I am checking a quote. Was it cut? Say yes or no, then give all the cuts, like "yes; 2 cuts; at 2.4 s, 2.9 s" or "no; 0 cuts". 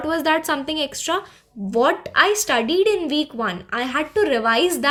no; 0 cuts